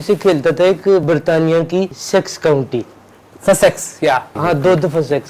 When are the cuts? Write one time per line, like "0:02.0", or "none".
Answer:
0:01.0
0:02.0
0:04.3